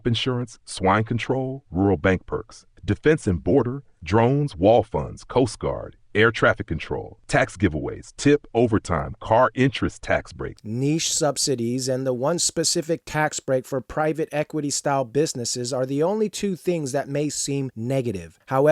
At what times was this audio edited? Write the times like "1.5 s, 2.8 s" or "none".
10.6 s